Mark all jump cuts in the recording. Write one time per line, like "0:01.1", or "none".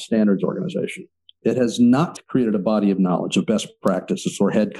none